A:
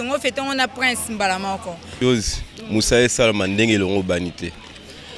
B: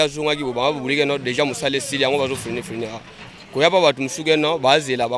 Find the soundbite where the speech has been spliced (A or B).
A